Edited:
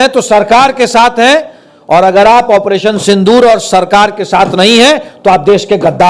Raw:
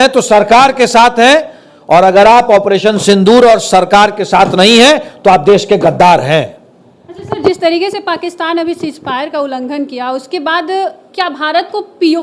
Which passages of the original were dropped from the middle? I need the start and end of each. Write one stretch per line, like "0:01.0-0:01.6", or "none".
none